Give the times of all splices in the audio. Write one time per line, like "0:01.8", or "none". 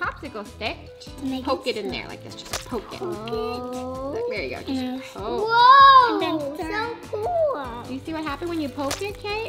0:01.0